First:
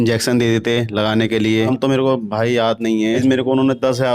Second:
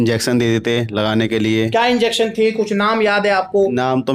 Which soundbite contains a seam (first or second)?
first